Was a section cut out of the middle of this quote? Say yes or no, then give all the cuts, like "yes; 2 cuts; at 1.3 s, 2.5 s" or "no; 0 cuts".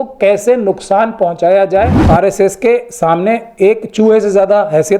yes; 1 cut; at 2.0 s